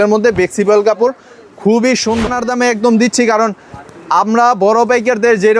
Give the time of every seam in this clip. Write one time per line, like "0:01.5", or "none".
0:02.3

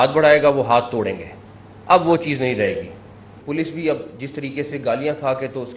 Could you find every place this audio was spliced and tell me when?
0:03.4

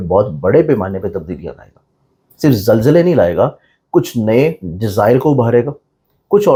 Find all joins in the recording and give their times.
none

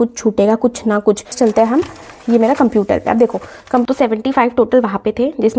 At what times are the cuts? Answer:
0:01.3
0:03.8

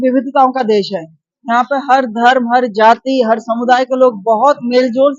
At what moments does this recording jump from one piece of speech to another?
none

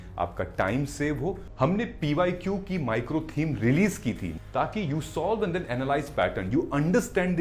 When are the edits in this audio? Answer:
0:01.5
0:04.3

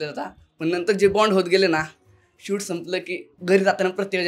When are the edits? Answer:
none

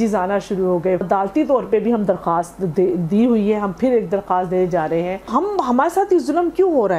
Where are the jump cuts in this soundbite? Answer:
0:01.0
0:05.3

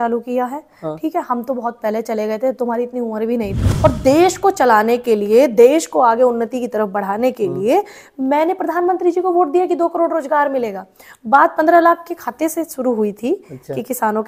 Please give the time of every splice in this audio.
0:03.6

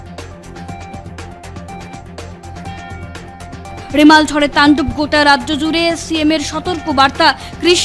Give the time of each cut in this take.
0:02.6

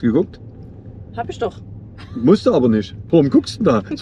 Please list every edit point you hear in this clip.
none

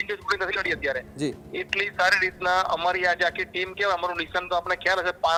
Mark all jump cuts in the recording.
none

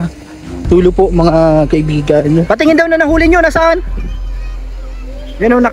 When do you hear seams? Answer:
0:02.4

